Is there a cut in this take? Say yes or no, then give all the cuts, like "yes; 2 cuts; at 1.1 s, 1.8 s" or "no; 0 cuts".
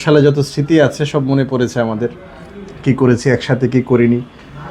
no; 0 cuts